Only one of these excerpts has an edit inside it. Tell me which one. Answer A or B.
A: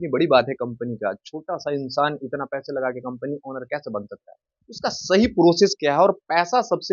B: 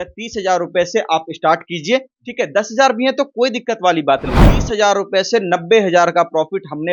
B